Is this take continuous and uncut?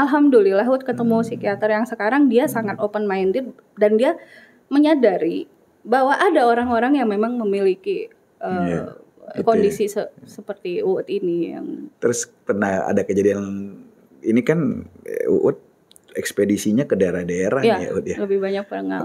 yes; 0 cuts

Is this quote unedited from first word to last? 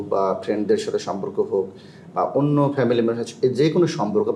yes; 0 cuts

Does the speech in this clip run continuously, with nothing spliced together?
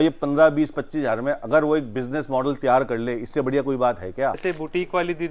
no; 1 cut; at 4.4 s

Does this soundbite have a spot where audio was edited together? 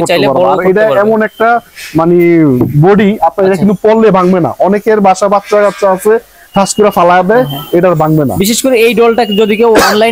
no; 0 cuts

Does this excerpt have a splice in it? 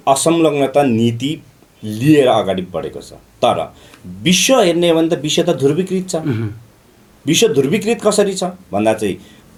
no; 0 cuts

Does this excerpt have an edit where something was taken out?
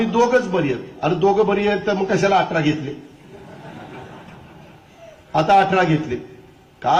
no; 0 cuts

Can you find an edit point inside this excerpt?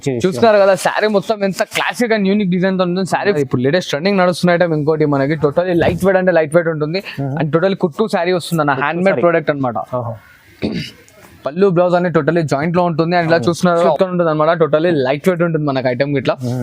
yes; 2 cuts; at 3.4 s, 13.9 s

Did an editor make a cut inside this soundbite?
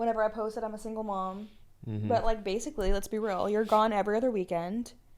no; 0 cuts

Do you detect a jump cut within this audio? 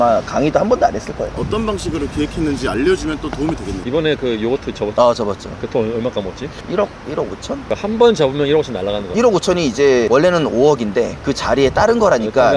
no; 0 cuts

